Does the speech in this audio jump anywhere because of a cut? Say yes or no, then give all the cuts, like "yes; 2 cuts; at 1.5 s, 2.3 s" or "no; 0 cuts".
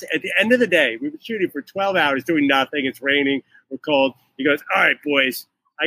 no; 0 cuts